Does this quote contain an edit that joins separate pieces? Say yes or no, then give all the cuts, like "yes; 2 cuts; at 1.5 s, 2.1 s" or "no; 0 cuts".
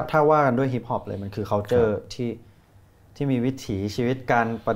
no; 0 cuts